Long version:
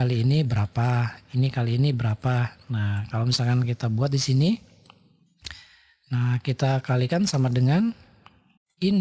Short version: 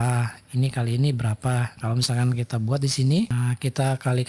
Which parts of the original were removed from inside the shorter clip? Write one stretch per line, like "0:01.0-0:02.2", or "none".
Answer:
0:02.5-0:03.0
0:04.6-0:06.2